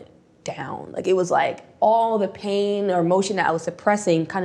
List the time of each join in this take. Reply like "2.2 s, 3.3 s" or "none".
none